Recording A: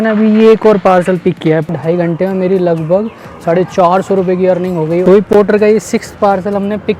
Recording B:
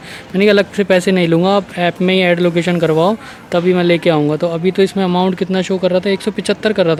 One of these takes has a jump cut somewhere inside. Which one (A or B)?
A